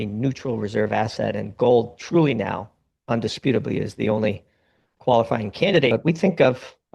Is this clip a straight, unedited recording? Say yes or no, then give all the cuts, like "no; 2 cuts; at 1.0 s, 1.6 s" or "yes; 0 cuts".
no; 1 cut; at 5.9 s